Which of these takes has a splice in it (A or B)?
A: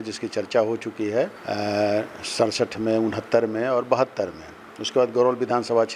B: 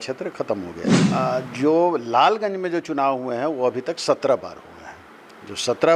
A